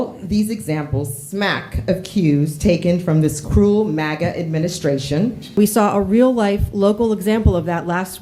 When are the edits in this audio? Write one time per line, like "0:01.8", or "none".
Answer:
0:05.6